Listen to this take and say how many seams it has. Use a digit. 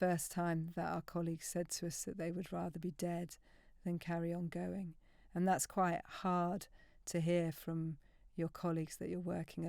0